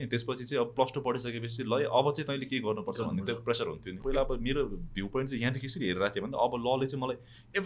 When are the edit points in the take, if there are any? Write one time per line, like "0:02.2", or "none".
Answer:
0:03.9